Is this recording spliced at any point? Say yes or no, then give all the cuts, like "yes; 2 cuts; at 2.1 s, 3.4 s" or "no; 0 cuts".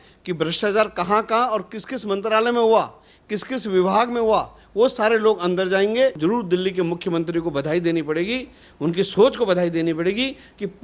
yes; 1 cut; at 6.2 s